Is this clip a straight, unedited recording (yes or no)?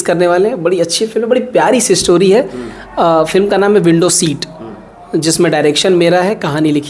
yes